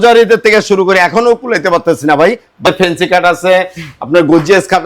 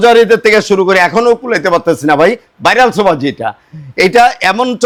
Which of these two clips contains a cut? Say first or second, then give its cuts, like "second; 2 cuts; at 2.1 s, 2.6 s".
first; 1 cut; at 2.7 s